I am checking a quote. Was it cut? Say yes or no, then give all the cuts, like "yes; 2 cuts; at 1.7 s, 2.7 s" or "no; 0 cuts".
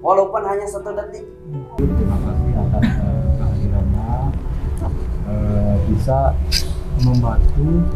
yes; 1 cut; at 1.7 s